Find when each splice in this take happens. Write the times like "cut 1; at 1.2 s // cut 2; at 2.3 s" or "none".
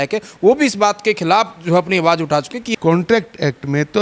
cut 1; at 2.6 s